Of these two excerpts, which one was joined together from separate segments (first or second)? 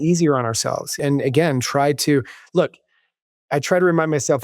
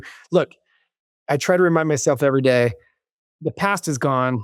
first